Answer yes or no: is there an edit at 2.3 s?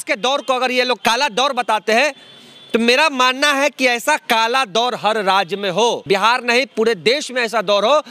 no